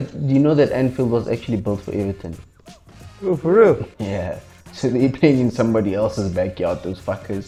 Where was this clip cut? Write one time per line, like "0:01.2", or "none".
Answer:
none

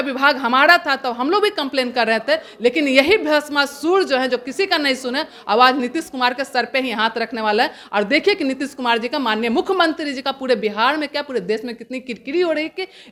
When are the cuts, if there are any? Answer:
none

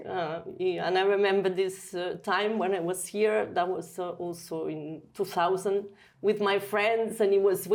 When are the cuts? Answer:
none

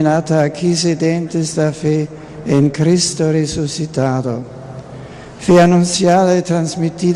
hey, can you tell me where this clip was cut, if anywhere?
0:02.2

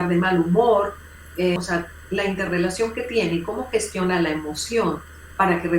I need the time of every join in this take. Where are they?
0:01.6

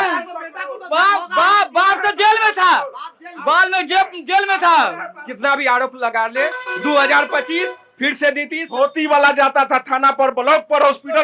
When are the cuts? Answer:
0:05.2
0:08.6

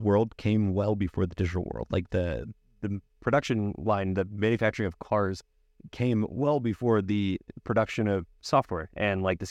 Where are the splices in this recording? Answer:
none

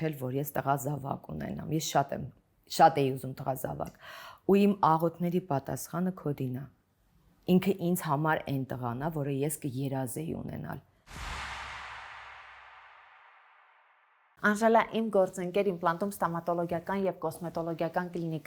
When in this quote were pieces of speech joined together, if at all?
none

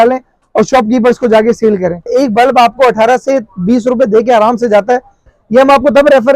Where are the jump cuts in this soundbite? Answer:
0:02.1
0:05.3

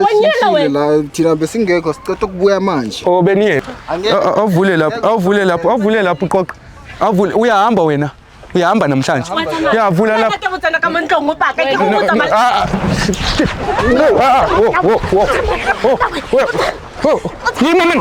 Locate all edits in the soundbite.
0:03.7

